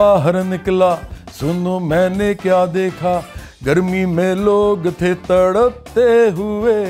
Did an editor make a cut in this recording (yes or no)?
no